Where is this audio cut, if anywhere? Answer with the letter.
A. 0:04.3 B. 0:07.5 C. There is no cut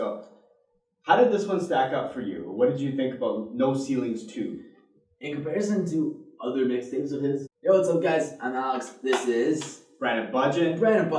C